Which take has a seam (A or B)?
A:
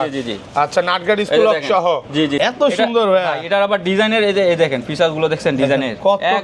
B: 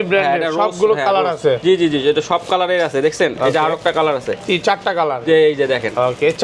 A